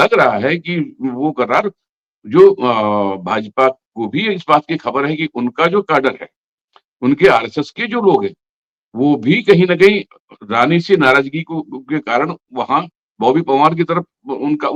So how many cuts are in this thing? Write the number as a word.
zero